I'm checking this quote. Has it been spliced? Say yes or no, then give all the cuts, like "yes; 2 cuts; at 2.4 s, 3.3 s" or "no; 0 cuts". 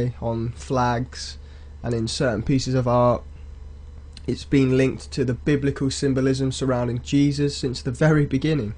yes; 1 cut; at 2.4 s